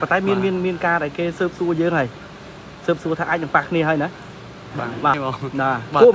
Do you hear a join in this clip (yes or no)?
yes